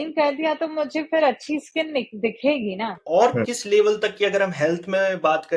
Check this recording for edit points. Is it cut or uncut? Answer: cut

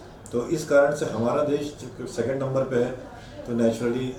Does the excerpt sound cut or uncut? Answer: uncut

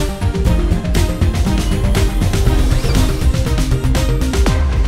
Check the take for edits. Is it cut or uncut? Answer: uncut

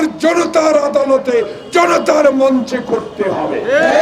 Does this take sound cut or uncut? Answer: uncut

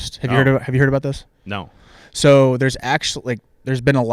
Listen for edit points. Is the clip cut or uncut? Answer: uncut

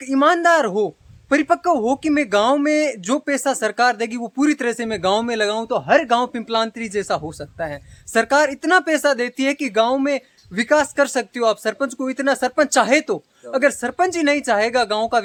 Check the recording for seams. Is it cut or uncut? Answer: uncut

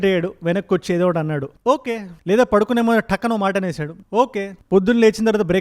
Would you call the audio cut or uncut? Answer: uncut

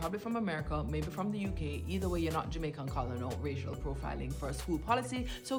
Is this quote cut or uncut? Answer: uncut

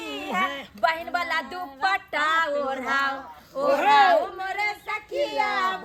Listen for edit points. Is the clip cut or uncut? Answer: uncut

